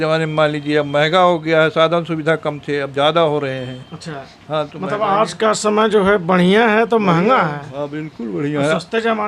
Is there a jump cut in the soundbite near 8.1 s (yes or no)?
no